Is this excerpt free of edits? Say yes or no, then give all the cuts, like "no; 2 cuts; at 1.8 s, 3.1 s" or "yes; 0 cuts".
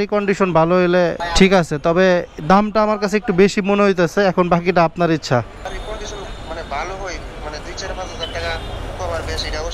no; 2 cuts; at 1.2 s, 5.7 s